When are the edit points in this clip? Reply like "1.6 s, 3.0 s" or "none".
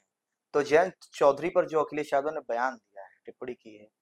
none